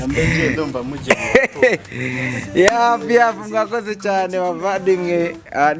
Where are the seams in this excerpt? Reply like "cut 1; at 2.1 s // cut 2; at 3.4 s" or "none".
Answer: none